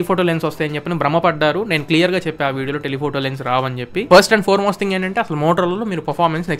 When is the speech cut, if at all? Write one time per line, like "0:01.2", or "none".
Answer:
0:04.0